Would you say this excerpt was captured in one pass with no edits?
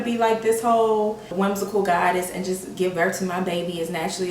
no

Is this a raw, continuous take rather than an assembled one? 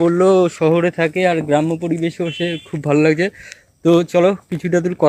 yes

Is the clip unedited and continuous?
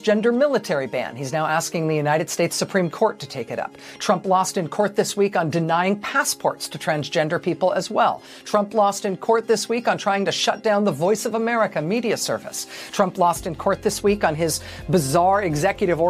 yes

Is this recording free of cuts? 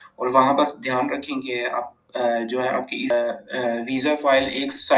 no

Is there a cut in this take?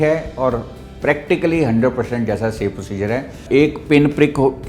yes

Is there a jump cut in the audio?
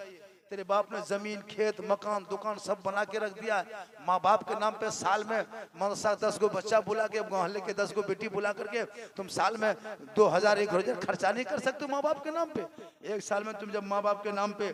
no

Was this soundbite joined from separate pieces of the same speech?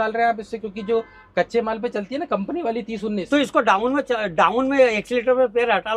no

